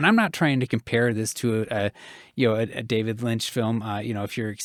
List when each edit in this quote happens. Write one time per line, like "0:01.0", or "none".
none